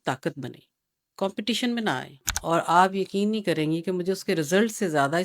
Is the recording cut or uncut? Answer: cut